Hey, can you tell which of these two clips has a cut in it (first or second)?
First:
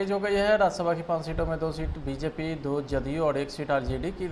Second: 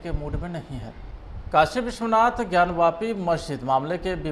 second